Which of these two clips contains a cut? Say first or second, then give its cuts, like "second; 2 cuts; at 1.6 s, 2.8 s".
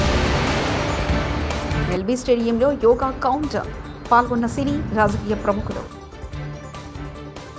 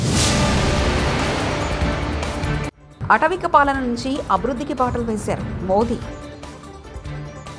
first; 1 cut; at 1.7 s